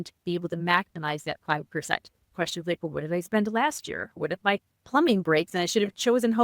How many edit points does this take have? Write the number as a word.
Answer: two